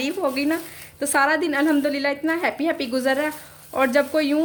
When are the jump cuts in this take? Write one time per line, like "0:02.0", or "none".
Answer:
none